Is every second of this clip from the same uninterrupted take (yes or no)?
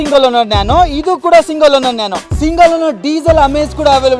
no